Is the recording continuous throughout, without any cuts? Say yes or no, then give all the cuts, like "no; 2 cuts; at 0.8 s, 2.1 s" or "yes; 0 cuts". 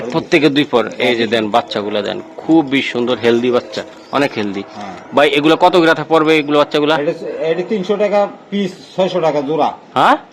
yes; 0 cuts